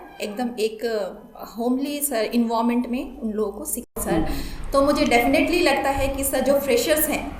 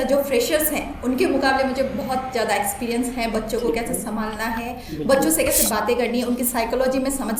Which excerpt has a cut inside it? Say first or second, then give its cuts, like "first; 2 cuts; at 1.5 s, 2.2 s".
first; 1 cut; at 4.0 s